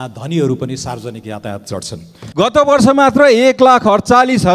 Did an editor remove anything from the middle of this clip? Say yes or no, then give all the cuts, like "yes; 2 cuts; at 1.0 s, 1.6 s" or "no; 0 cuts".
yes; 1 cut; at 2.2 s